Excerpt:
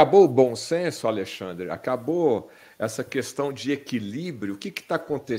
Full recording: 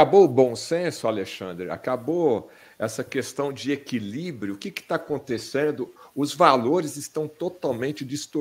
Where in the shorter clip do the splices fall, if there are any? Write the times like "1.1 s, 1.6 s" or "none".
none